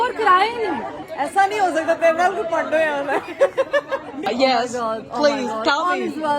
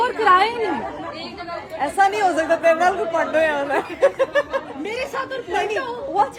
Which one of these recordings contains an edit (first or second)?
first